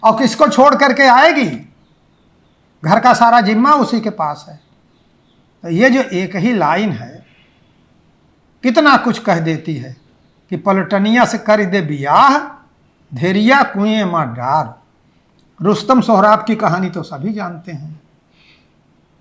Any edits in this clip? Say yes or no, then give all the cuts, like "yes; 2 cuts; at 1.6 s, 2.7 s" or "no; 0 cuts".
no; 0 cuts